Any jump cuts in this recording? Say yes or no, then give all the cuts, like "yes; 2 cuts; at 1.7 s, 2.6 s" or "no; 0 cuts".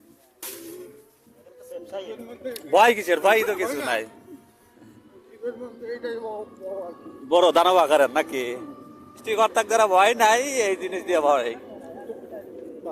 yes; 1 cut; at 9.3 s